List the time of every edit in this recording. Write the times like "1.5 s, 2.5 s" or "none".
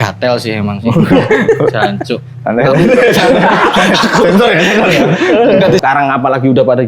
5.8 s